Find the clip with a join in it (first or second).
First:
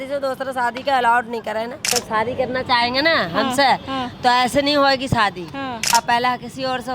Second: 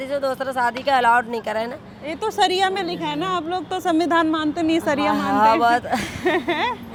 first